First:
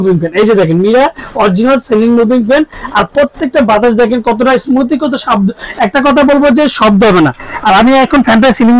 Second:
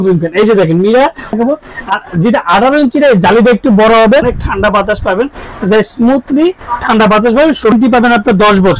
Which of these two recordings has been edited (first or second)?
second